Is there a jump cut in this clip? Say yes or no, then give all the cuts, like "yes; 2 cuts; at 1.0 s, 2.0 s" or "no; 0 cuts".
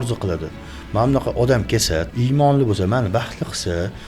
yes; 1 cut; at 2.1 s